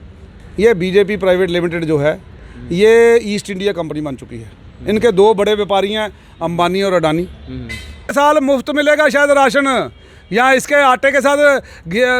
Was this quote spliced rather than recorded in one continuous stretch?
yes; 1 cut; at 8.1 s

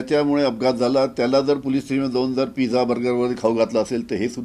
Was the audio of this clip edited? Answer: no; 0 cuts

